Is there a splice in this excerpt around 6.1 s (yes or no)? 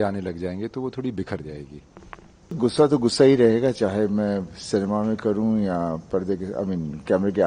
no